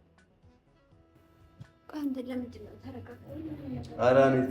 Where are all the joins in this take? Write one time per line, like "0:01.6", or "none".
0:01.0